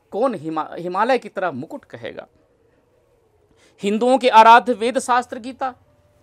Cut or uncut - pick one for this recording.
uncut